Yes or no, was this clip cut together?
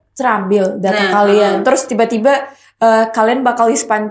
no